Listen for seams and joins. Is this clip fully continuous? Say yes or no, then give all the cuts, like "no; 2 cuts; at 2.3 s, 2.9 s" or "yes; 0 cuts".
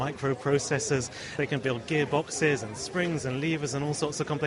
no; 1 cut; at 1.3 s